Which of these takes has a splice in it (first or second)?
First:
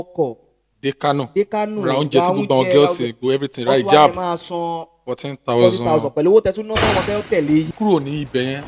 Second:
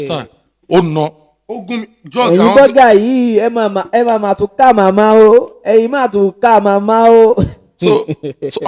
first